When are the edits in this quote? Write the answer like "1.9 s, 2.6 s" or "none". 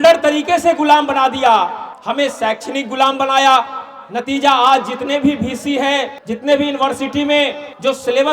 none